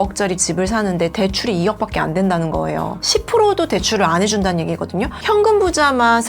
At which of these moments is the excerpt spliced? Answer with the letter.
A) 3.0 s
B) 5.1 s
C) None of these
A